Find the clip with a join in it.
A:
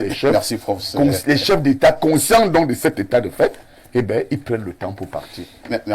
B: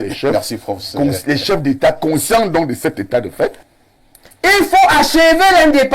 B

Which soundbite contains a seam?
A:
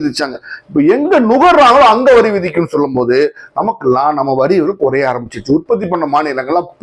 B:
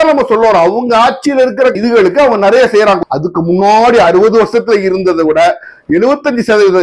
B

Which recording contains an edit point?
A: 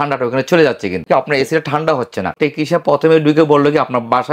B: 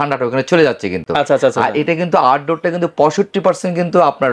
A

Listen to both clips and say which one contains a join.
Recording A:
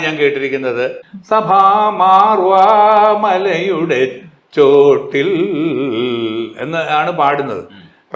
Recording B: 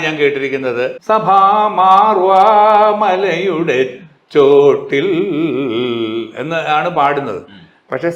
B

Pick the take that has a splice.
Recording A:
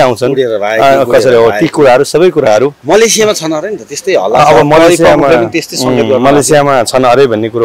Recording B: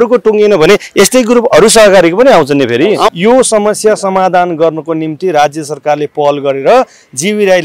B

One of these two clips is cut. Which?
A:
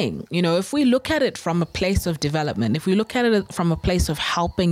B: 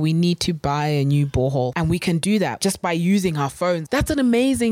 B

